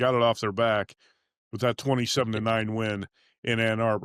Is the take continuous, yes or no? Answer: yes